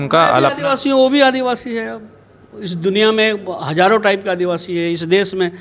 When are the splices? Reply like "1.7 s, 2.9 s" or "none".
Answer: none